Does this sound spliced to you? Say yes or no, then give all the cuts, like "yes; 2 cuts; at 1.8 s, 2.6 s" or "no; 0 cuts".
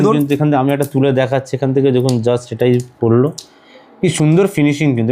no; 0 cuts